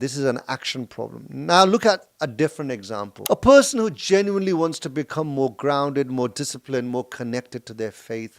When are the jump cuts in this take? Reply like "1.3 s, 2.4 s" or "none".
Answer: 3.1 s